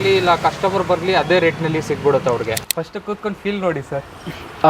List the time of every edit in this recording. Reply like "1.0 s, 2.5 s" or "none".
2.5 s

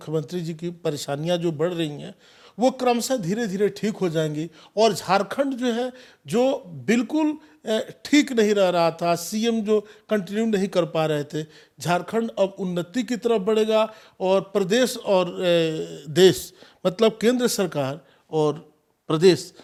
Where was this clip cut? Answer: none

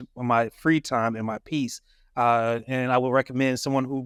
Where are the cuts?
none

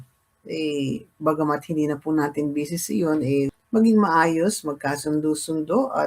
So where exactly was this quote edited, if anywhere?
3.4 s

